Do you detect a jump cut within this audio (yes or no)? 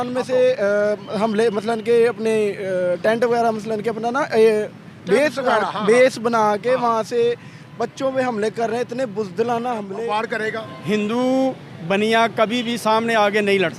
yes